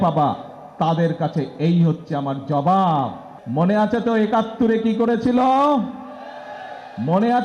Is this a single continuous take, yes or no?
no